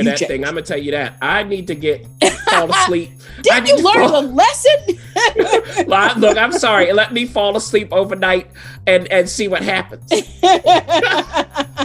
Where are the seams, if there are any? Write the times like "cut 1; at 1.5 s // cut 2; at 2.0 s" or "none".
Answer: none